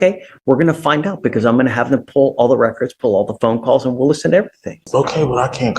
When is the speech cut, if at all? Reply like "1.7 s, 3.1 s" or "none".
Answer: 4.8 s